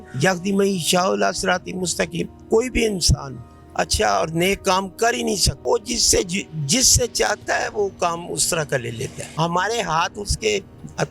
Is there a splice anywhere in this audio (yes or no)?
yes